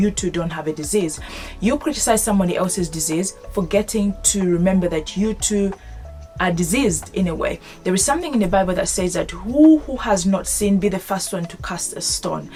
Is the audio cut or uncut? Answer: uncut